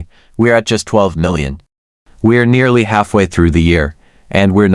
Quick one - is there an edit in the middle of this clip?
no; 0 cuts

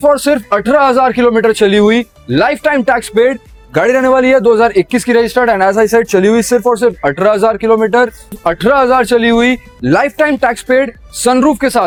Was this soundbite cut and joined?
no; 0 cuts

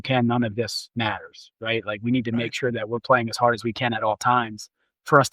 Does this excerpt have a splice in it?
no; 0 cuts

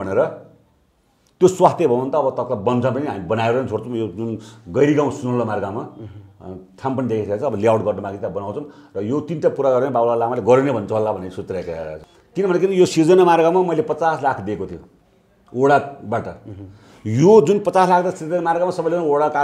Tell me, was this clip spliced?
yes; 1 cut; at 11.8 s

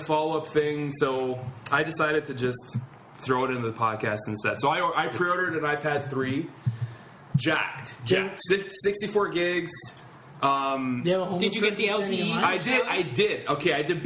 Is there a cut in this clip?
yes; 1 cut; at 3.9 s

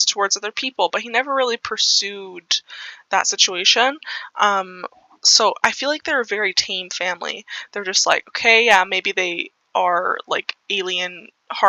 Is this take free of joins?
yes; 0 cuts

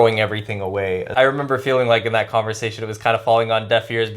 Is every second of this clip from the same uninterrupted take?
no; 1 cut; at 1.1 s

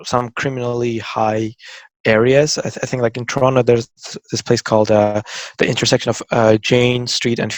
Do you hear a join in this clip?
no; 0 cuts

